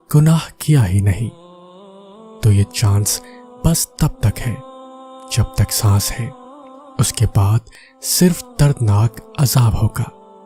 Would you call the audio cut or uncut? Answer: uncut